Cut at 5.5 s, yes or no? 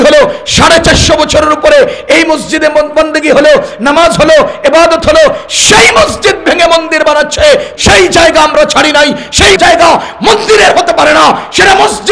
no